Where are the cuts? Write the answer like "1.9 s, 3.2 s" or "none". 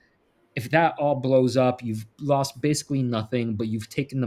none